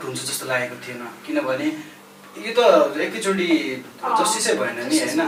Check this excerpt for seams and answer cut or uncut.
uncut